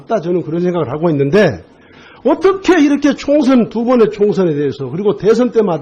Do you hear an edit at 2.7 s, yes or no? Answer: no